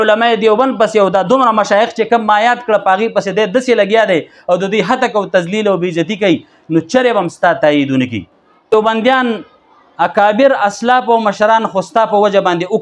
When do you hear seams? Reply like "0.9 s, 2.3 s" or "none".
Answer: 8.7 s